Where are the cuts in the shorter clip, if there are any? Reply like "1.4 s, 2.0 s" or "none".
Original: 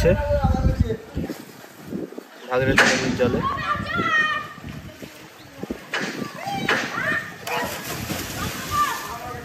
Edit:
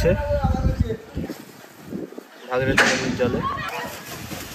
3.7 s